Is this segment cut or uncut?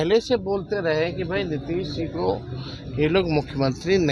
uncut